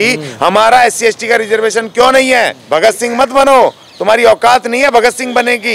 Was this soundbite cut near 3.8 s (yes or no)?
no